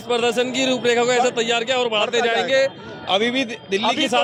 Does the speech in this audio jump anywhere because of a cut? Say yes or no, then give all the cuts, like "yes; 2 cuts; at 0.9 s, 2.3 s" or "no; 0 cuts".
no; 0 cuts